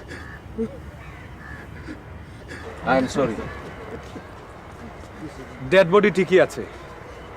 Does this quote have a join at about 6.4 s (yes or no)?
no